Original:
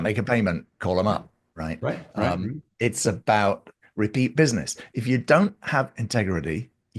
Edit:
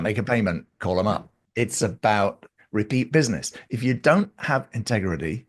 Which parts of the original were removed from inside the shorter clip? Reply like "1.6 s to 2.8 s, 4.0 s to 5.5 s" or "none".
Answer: 1.4 s to 2.6 s